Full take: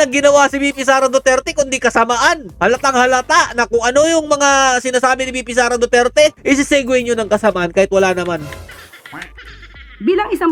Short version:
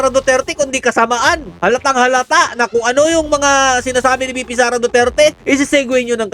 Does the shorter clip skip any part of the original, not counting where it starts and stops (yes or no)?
no